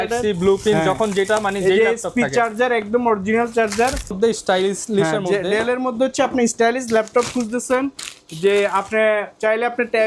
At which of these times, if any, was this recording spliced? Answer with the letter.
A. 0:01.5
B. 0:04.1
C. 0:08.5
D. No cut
B